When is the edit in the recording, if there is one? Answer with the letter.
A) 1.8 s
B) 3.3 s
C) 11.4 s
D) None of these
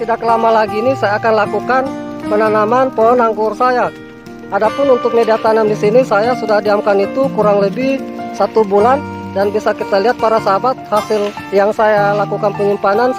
C